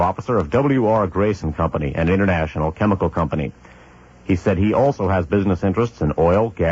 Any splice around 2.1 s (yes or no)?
yes